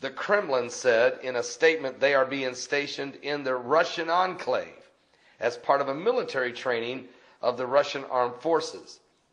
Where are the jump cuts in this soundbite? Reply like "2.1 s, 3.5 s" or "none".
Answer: none